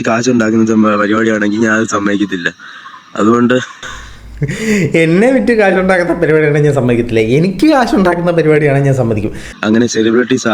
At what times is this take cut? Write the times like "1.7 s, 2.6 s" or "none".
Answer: 9.4 s

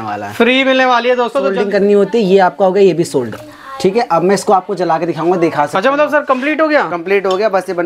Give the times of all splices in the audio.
1.6 s

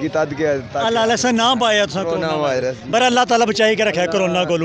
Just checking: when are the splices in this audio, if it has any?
none

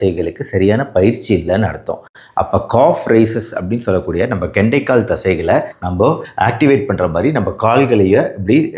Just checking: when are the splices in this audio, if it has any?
none

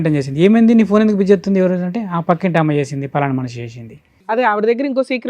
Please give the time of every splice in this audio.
4.4 s

